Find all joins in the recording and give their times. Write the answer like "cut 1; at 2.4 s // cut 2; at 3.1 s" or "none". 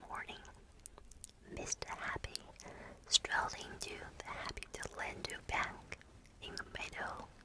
none